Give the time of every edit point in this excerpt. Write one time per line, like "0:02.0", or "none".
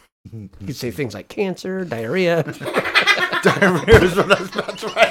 none